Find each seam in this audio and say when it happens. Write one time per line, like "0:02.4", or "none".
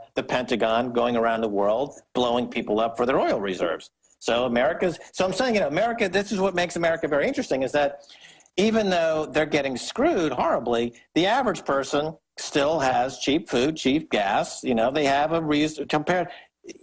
0:13.5